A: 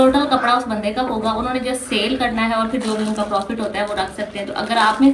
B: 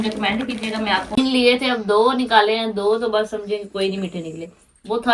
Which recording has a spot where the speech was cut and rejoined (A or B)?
B